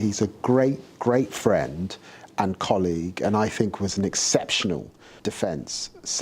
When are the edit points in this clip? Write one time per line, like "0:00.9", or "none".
0:05.1

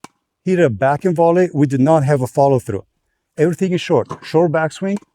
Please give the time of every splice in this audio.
none

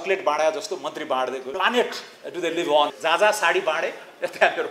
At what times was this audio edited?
0:01.5
0:02.9

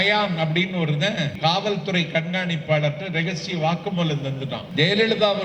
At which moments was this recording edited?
0:01.3
0:04.7

